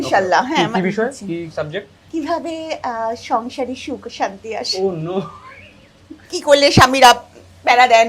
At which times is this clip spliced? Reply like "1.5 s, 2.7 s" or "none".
2.0 s, 6.2 s